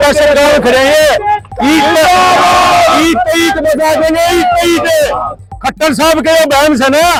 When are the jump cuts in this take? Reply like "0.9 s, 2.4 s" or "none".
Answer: none